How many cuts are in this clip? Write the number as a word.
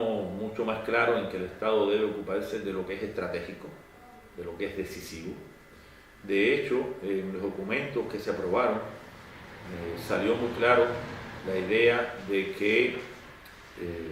one